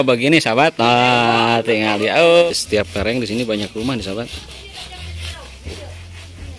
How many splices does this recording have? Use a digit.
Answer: 1